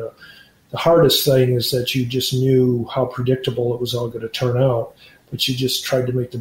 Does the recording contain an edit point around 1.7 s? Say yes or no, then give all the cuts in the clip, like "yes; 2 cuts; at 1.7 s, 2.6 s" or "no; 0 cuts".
no; 0 cuts